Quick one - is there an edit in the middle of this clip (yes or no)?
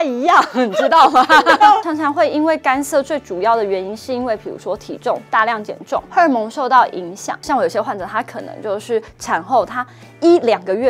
yes